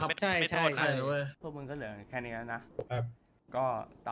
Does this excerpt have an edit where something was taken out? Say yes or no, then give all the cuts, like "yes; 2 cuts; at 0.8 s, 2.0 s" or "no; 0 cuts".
yes; 2 cuts; at 1.4 s, 2.7 s